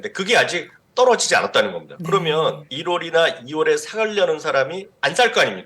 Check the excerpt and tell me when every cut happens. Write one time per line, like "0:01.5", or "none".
0:02.7